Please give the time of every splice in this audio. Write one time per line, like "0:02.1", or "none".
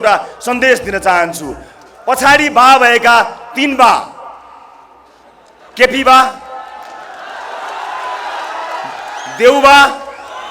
none